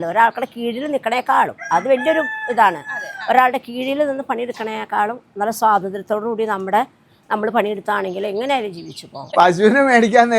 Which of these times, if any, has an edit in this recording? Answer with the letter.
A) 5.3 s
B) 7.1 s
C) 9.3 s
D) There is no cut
C